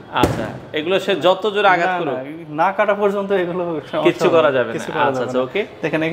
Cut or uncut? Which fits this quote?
uncut